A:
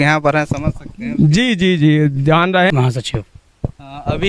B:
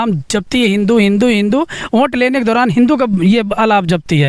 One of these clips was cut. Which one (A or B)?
A